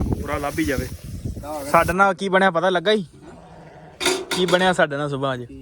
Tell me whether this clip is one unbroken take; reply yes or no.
no